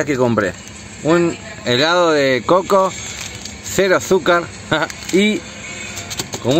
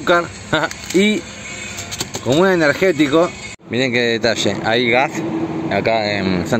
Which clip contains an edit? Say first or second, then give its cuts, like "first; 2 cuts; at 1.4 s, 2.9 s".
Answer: second; 1 cut; at 3.7 s